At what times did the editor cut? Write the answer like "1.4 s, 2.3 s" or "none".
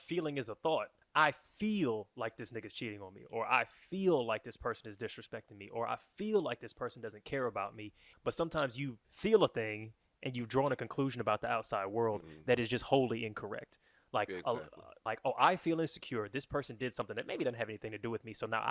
1.0 s, 8.1 s, 15.0 s